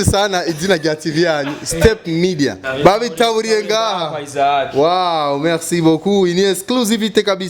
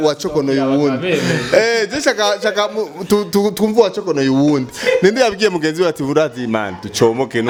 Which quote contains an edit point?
first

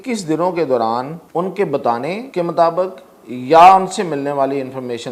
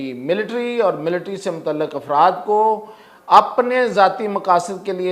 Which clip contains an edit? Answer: first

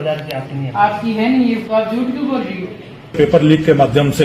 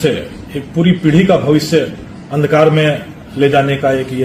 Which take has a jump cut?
first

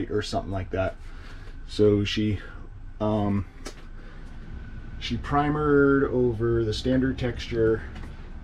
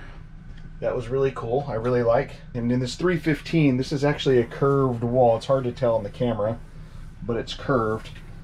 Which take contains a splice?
second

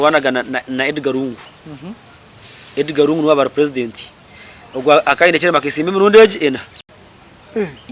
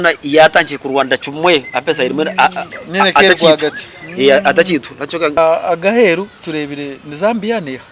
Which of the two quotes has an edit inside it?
second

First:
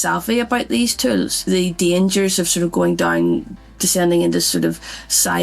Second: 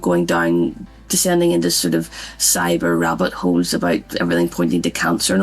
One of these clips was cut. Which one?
first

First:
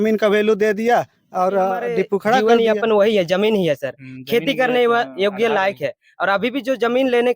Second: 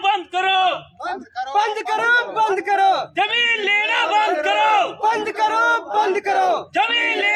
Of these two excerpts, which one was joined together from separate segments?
first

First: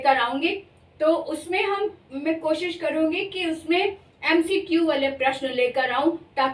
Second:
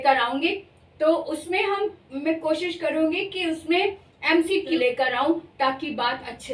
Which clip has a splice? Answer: second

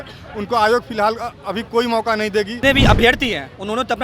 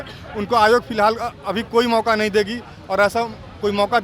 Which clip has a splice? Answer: first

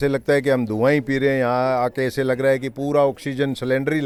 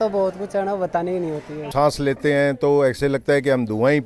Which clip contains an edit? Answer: second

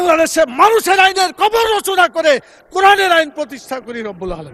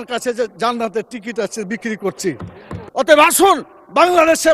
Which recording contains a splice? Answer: second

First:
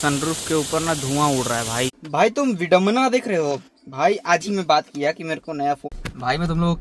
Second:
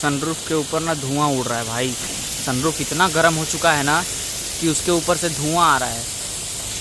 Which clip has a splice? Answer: first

